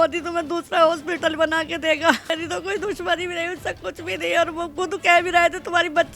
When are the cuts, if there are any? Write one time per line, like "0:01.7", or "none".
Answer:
0:02.3